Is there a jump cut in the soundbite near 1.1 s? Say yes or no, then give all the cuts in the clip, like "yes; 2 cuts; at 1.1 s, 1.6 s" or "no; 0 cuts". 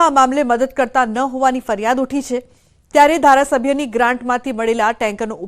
yes; 1 cut; at 1.1 s